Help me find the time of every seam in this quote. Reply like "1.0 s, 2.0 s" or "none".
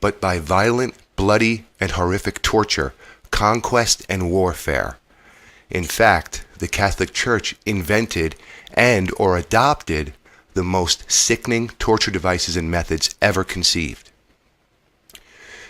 13.7 s